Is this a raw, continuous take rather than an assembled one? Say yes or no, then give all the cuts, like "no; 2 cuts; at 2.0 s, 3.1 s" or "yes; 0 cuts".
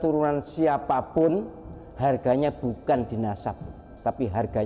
yes; 0 cuts